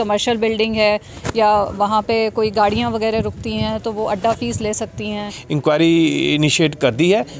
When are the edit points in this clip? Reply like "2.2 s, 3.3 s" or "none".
5.2 s